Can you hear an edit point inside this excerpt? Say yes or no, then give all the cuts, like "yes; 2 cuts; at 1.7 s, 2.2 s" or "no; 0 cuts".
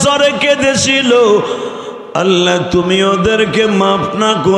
no; 0 cuts